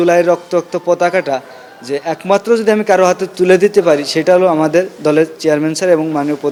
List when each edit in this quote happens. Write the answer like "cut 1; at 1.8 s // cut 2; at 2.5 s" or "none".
none